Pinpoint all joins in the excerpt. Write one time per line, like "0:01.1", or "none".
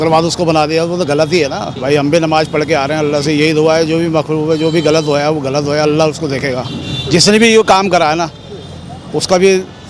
0:01.7